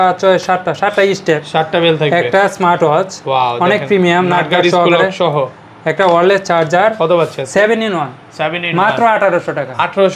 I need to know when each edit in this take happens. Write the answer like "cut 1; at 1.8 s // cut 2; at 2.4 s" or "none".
none